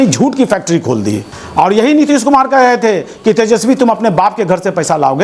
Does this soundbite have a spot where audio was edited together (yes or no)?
yes